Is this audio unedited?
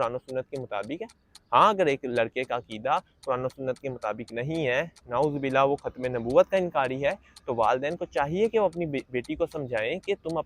yes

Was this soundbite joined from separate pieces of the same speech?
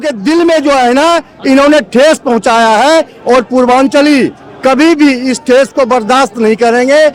no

